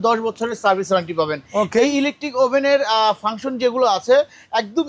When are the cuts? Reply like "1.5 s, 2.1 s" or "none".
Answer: none